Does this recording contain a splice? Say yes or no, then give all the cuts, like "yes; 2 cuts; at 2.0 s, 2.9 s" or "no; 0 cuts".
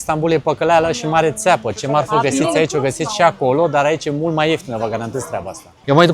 no; 0 cuts